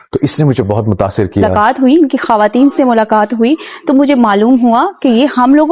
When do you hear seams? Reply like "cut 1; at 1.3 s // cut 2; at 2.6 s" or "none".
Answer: cut 1; at 1.5 s

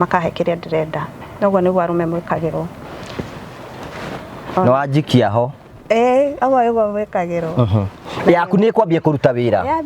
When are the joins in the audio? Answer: cut 1; at 8.0 s

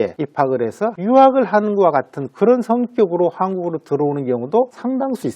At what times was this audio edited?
cut 1; at 1.0 s

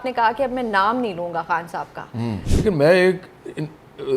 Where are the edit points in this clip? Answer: cut 1; at 2.4 s

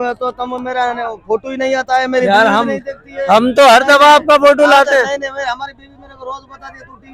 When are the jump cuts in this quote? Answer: none

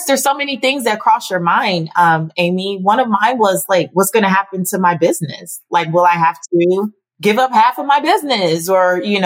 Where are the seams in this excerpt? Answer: cut 1; at 7.0 s

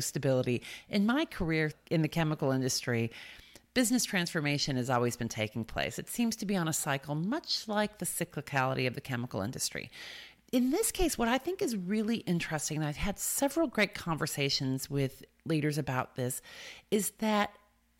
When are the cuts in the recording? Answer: cut 1; at 1.8 s

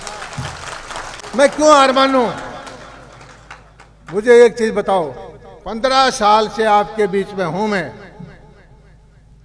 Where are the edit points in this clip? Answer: cut 1; at 1.2 s

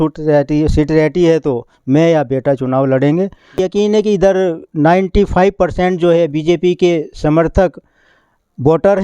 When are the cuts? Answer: cut 1; at 3.6 s

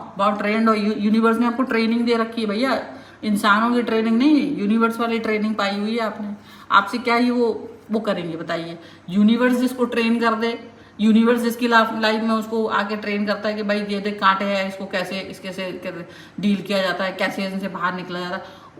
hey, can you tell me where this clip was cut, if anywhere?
none

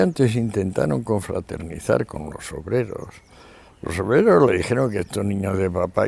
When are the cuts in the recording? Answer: none

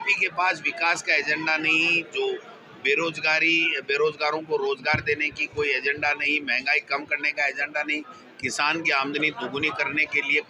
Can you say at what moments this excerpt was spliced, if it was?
none

